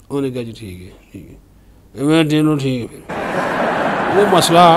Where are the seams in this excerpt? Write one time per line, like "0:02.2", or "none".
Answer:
0:03.0
0:04.0